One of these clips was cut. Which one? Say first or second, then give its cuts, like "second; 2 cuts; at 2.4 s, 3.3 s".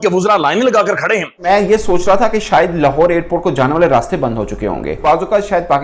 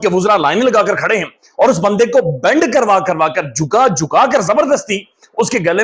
first; 2 cuts; at 1.4 s, 5.0 s